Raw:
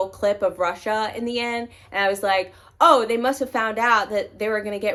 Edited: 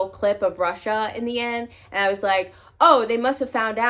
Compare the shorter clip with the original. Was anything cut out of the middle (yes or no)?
no